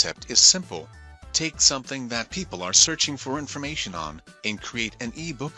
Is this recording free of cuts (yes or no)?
yes